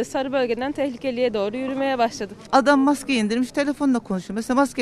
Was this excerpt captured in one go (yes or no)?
no